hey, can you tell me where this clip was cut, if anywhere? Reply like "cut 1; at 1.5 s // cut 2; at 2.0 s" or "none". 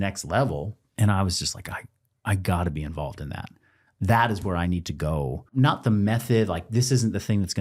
cut 1; at 5.5 s